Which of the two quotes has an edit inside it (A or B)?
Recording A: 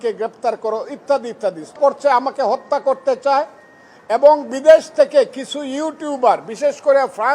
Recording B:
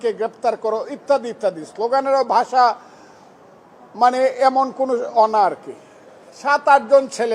A